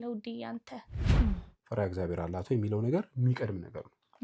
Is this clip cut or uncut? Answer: cut